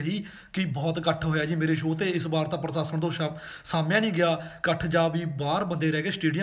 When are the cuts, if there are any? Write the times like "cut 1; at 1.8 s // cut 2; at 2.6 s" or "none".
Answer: none